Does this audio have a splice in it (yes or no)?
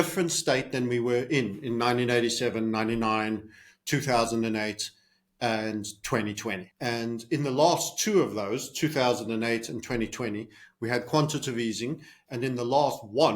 yes